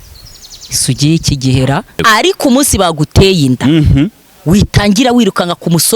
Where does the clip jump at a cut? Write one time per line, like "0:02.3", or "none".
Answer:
0:02.0